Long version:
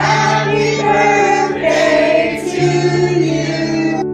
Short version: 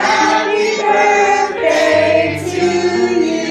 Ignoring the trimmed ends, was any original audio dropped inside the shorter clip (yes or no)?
no